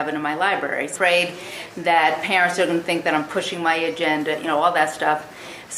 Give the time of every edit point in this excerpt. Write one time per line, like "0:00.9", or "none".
none